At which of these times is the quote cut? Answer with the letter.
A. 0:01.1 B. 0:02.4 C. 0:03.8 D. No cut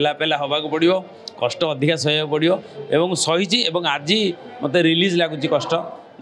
D